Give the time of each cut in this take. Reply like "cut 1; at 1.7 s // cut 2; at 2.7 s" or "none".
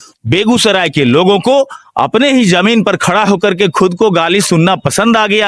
none